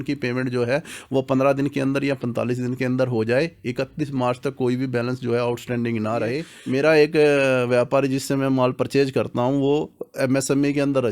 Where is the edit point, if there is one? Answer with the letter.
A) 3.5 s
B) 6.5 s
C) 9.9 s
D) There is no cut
B